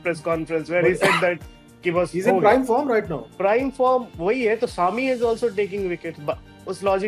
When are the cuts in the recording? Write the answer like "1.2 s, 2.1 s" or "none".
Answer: 3.2 s